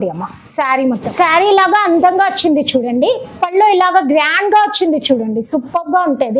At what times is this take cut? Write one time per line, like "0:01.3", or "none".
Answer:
0:01.0